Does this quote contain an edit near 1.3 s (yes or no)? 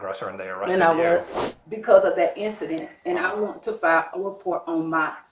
yes